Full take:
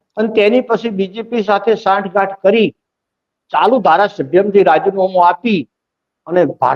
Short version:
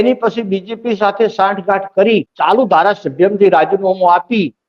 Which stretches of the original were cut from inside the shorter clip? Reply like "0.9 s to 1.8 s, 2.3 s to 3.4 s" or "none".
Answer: 2.8 s to 3.5 s